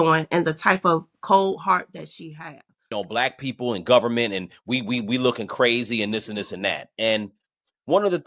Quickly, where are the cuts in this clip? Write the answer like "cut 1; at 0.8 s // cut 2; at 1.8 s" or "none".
cut 1; at 2.9 s